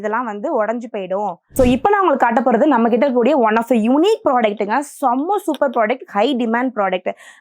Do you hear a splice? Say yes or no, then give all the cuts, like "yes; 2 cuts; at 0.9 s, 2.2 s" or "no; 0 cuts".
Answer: yes; 1 cut; at 1.4 s